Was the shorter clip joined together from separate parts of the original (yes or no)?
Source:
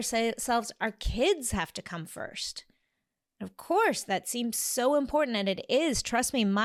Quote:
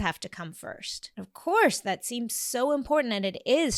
yes